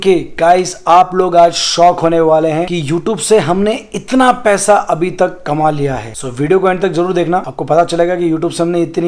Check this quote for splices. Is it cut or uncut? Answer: uncut